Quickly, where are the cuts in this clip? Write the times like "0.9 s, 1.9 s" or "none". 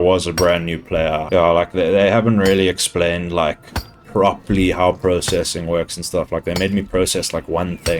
1.2 s, 3.9 s